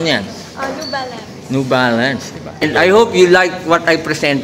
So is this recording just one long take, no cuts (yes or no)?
no